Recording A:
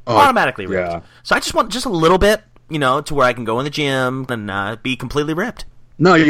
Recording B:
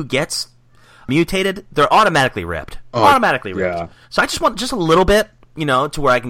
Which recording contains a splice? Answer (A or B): B